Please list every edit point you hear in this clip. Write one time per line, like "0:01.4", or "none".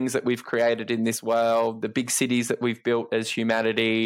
0:01.8